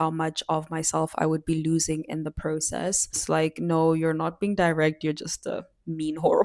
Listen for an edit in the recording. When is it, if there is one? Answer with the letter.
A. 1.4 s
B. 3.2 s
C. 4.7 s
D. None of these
B